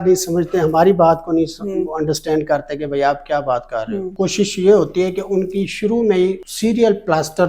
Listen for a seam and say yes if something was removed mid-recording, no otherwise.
yes